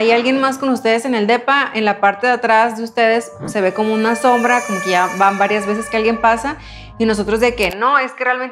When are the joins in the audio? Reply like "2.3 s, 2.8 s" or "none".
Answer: none